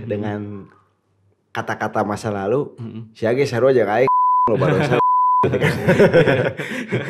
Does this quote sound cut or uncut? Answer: uncut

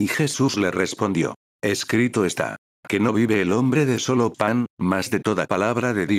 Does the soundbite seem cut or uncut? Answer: cut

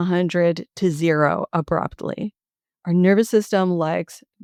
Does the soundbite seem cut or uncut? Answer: uncut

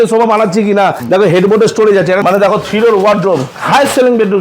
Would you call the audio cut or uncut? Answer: cut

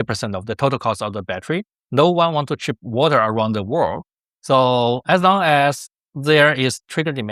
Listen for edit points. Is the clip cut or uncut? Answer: uncut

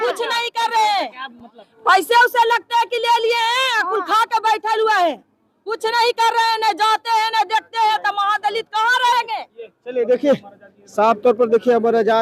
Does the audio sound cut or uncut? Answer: uncut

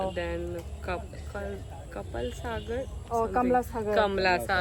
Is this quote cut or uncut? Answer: uncut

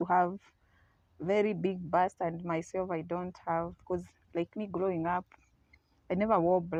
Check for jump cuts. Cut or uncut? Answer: uncut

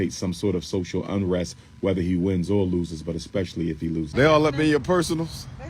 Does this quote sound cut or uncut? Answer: cut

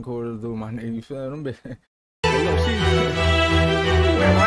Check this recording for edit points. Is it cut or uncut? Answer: uncut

